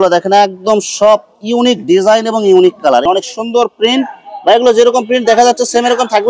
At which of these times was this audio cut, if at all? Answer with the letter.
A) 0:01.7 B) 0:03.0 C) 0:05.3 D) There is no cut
B